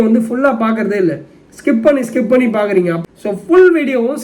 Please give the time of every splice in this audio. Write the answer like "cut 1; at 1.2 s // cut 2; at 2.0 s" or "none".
cut 1; at 3.0 s